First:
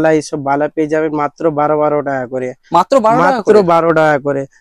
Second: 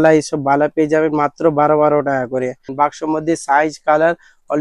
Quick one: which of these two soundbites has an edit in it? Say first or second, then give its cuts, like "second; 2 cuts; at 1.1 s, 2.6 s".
second; 1 cut; at 2.6 s